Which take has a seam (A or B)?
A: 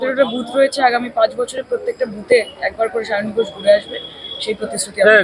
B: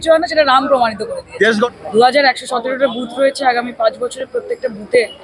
B